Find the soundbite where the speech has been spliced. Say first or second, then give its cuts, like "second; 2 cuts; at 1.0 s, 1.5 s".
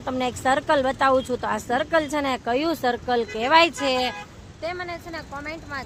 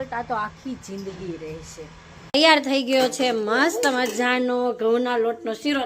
second; 1 cut; at 2.3 s